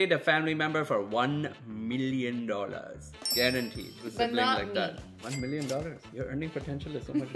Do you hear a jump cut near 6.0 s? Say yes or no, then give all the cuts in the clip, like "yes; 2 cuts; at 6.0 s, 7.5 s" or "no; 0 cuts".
yes; 2 cuts; at 4.0 s, 6.0 s